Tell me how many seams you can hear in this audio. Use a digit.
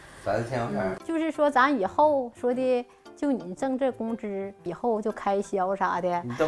1